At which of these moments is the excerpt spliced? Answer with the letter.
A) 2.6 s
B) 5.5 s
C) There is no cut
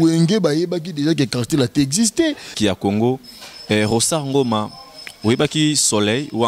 A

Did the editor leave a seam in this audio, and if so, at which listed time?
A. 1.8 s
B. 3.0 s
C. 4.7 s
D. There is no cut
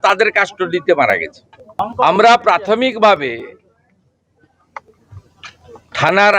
A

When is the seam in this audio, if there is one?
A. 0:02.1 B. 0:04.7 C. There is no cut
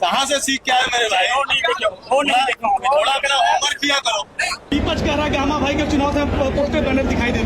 B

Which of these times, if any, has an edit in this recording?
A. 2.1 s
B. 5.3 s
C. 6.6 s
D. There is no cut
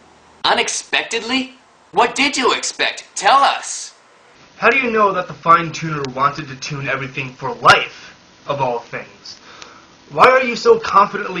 C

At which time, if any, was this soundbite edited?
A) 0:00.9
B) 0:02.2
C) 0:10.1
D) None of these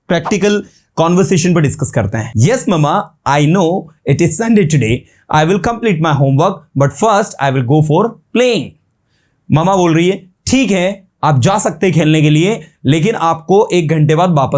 B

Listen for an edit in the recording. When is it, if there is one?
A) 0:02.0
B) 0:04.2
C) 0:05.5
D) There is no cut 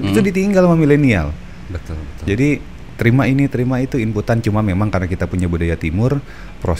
D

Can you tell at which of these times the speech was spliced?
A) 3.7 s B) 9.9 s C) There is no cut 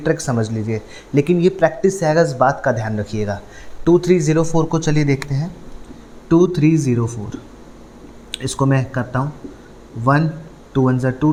C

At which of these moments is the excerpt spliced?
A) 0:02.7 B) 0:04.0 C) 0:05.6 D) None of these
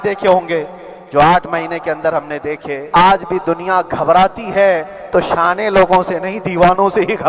A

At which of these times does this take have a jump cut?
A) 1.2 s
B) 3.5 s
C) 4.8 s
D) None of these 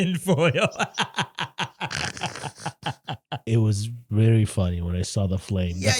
B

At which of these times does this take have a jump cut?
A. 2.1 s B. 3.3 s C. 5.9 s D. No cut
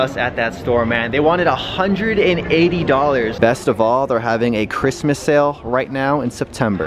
B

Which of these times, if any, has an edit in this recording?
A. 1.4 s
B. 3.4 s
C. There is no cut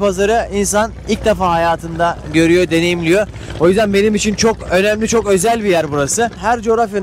C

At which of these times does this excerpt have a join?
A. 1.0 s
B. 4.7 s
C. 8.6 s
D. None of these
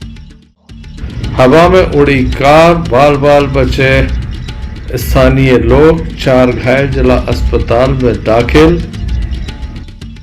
A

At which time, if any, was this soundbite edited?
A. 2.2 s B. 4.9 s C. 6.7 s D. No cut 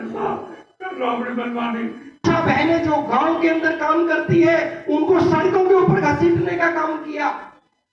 A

